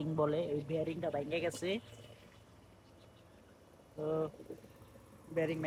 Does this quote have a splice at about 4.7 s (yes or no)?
no